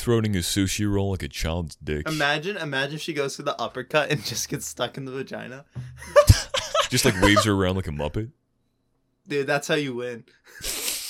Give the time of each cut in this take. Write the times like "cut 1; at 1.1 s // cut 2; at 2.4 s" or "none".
cut 1; at 2.0 s // cut 2; at 6.9 s